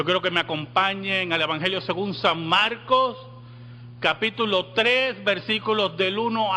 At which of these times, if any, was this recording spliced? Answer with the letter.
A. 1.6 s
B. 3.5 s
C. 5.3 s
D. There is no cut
B